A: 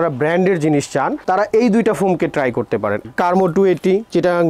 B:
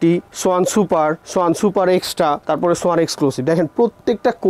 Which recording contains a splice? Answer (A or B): A